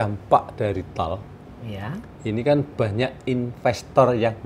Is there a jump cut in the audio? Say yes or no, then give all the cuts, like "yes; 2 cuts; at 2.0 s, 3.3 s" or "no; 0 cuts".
no; 0 cuts